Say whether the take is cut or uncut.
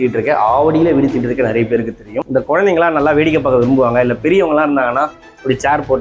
cut